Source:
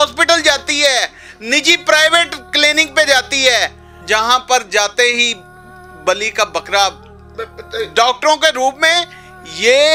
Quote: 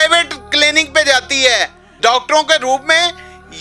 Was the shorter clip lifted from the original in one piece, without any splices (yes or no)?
no